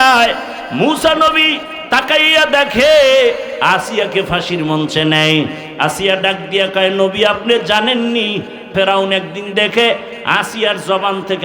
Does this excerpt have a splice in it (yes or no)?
yes